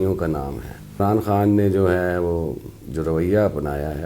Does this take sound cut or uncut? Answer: cut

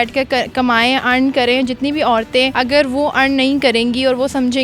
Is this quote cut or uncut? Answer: cut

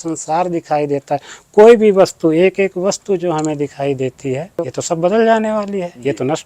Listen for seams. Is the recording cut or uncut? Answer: cut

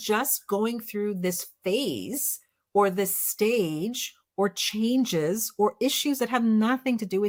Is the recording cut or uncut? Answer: uncut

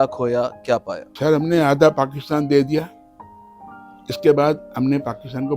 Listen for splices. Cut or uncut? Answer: cut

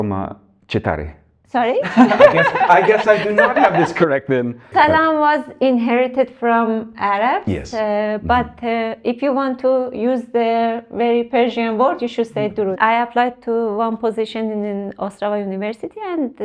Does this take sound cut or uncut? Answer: cut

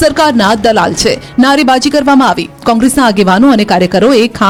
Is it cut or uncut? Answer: uncut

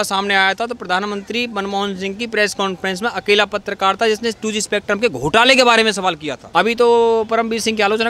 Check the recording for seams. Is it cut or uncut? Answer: cut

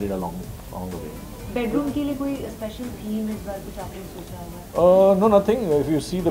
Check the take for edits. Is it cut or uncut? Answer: uncut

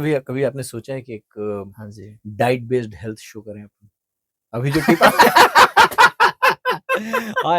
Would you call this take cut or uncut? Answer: uncut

